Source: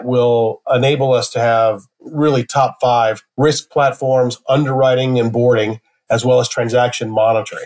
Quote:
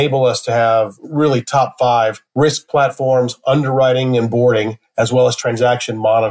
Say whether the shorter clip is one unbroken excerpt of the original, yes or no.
no